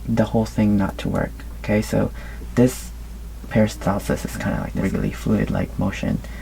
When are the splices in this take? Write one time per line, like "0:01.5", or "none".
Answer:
0:04.7